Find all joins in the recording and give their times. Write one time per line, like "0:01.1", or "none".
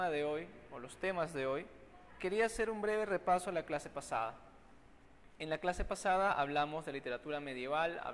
0:02.3